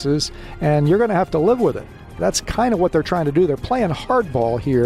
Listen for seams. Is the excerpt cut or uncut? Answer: cut